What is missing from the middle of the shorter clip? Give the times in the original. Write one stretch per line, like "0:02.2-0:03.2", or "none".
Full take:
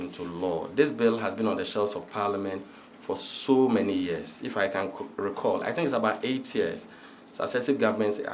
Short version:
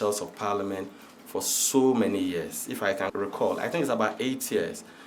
0:04.9-0:05.2